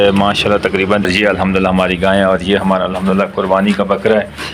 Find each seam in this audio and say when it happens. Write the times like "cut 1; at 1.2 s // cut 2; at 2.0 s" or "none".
cut 1; at 1.1 s